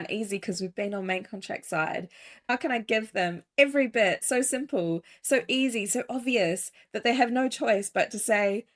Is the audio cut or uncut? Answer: cut